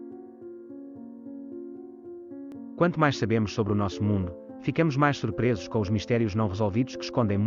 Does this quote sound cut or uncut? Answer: cut